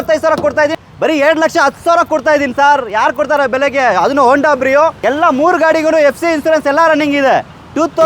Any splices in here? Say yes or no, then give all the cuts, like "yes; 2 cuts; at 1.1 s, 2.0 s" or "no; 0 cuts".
yes; 2 cuts; at 0.8 s, 5.0 s